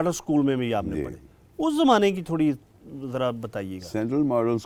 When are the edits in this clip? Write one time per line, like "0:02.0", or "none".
none